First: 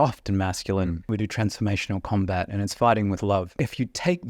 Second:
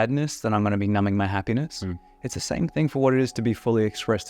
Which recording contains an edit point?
first; 2 cuts; at 1.1 s, 3.6 s

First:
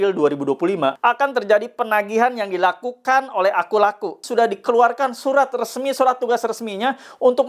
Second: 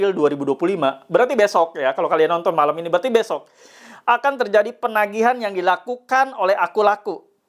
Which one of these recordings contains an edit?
first; 2 cuts; at 1.0 s, 4.2 s

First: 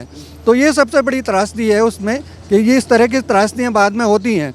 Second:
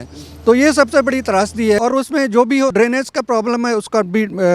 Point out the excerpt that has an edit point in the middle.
second; 2 cuts; at 1.8 s, 2.7 s

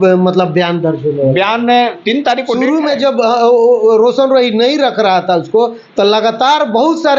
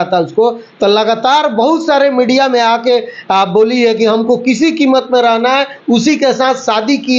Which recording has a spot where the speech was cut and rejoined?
first; 1 cut; at 2.5 s

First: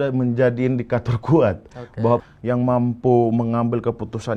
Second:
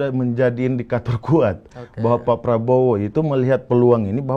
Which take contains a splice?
first; 1 cut; at 2.2 s

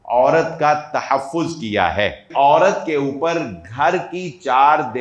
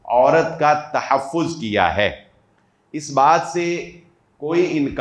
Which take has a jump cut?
first; 1 cut; at 2.2 s

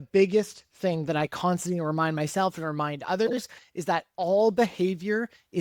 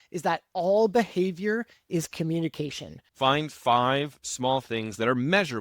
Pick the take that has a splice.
second; 1 cut; at 3.0 s

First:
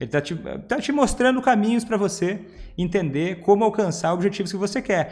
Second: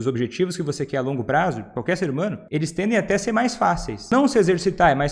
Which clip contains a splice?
second; 2 cuts; at 2.4 s, 3.9 s

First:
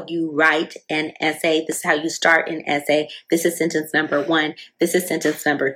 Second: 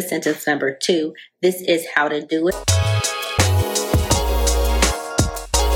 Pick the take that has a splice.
second; 1 cut; at 2.5 s

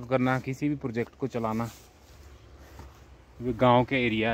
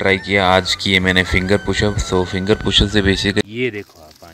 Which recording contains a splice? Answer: second; 1 cut; at 3.4 s

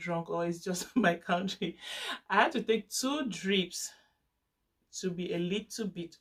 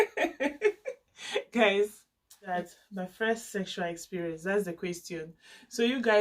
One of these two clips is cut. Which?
second; 1 cut; at 2.5 s

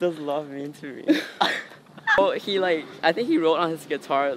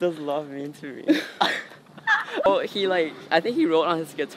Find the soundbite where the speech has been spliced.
first; 1 cut; at 2.2 s

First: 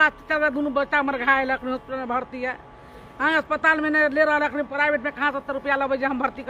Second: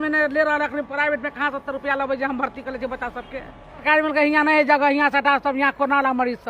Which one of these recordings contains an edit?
second; 1 cut; at 3.8 s

